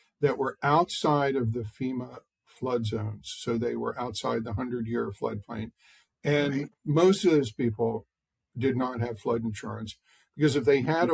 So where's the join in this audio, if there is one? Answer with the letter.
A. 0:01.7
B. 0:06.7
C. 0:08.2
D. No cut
B